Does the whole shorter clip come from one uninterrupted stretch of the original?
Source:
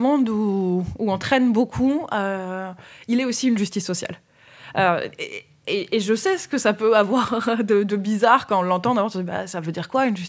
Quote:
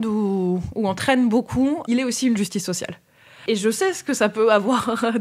no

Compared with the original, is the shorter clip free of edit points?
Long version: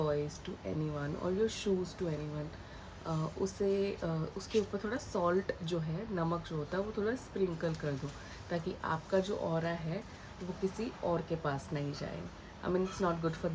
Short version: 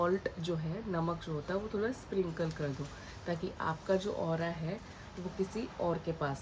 yes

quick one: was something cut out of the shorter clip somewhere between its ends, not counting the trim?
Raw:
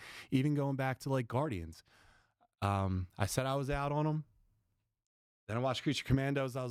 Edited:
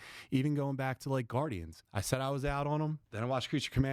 yes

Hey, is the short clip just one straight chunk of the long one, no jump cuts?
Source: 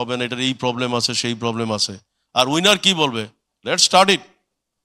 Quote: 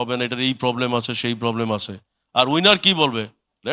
yes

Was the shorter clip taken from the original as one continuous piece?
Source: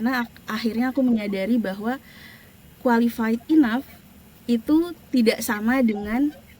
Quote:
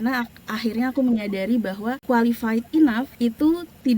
no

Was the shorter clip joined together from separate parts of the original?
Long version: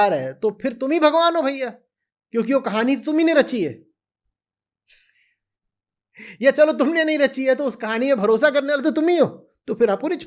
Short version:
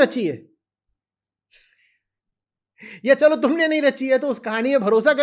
no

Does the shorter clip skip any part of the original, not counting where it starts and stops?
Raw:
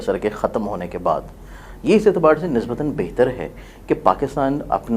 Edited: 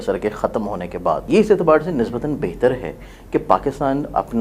yes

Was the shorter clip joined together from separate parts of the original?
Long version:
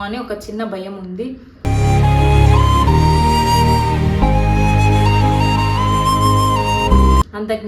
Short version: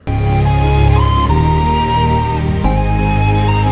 no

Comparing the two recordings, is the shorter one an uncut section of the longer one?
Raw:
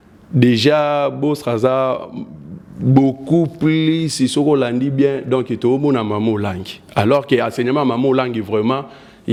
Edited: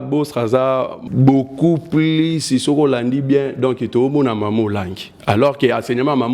no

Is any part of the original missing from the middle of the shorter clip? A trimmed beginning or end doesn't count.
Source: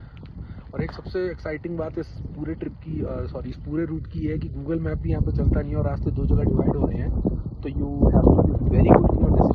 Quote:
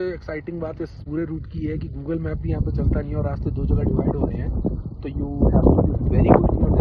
yes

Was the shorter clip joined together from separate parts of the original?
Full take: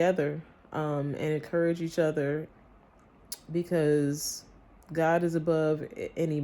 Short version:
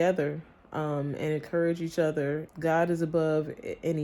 yes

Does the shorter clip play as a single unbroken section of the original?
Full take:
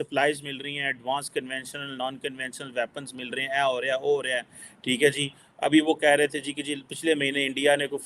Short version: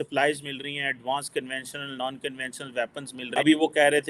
no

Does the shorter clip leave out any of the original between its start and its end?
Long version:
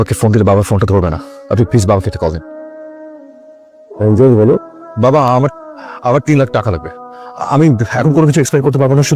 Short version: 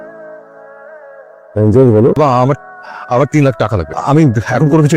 yes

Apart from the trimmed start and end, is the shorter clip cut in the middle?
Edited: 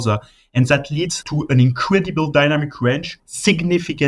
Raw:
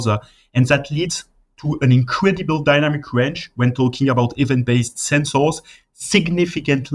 yes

